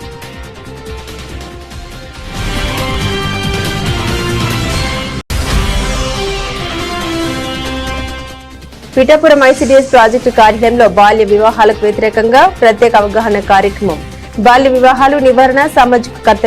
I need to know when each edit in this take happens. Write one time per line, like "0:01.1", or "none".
0:01.6
0:03.0